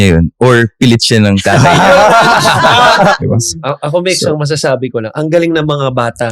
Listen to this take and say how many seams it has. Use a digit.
1